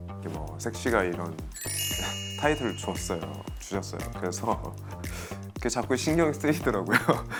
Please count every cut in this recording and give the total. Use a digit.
0